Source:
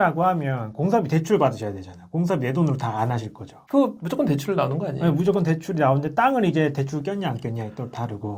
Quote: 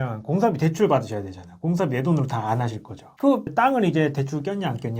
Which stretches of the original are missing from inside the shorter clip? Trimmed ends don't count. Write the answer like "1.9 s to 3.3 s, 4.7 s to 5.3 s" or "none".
4.0 s to 6.1 s